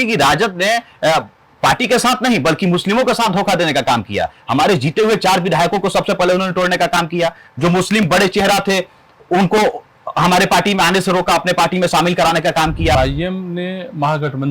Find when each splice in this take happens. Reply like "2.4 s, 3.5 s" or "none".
12.9 s